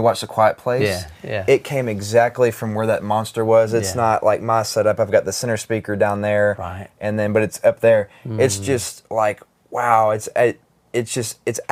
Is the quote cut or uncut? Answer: uncut